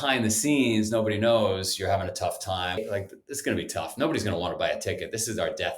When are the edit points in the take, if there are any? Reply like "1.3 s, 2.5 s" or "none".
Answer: 2.8 s